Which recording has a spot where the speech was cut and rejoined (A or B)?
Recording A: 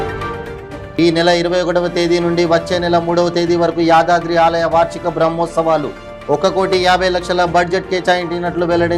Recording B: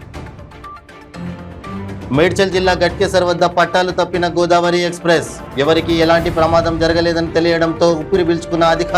B